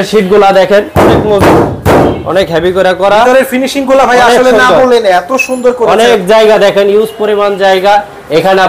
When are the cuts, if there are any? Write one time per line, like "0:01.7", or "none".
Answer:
none